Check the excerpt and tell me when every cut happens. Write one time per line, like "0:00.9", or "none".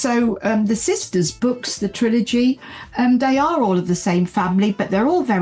0:01.4